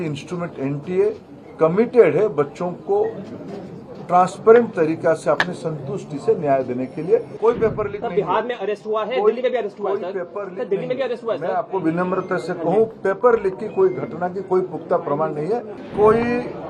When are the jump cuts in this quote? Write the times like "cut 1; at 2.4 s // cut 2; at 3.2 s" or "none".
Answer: cut 1; at 7.4 s // cut 2; at 15.8 s